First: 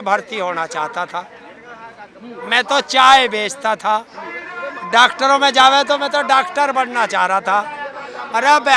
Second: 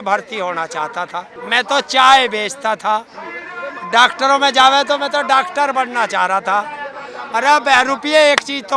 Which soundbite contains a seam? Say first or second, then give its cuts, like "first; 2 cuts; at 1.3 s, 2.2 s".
second; 1 cut; at 1.3 s